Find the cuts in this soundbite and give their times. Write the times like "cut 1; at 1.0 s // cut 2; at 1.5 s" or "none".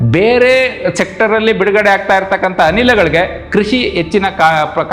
none